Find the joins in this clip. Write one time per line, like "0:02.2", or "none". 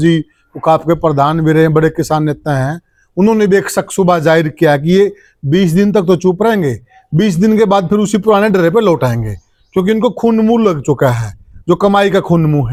none